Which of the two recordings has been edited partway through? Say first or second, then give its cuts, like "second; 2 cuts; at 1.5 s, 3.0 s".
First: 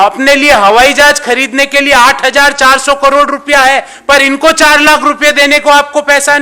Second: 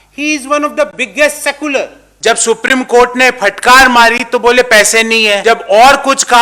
second; 2 cuts; at 2.0 s, 5.4 s